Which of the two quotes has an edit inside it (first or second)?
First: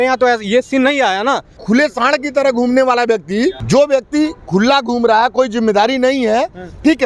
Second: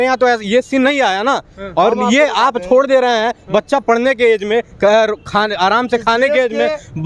first